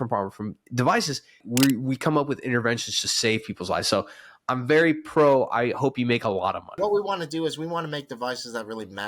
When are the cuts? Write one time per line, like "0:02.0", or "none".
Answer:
0:01.4
0:06.7